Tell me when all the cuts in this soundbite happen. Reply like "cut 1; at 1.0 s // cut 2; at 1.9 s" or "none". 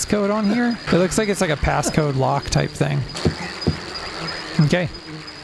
cut 1; at 0.8 s // cut 2; at 3.1 s